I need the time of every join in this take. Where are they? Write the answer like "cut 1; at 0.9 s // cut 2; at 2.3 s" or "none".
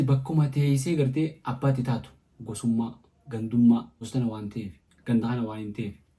cut 1; at 4.0 s